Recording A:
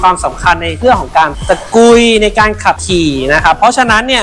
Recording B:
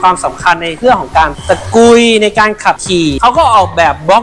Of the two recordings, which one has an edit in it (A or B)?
B